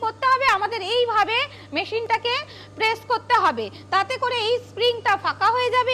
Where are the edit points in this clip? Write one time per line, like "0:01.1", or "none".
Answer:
none